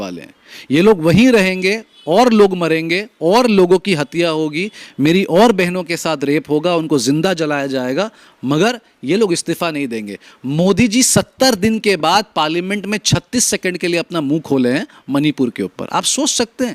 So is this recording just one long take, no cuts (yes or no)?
yes